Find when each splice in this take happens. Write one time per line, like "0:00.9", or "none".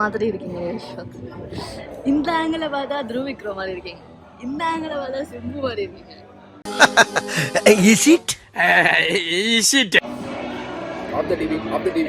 none